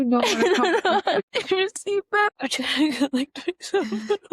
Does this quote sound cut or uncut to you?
cut